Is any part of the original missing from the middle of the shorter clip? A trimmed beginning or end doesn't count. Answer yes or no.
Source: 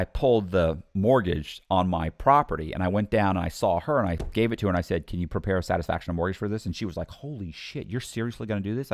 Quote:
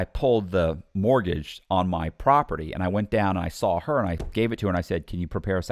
no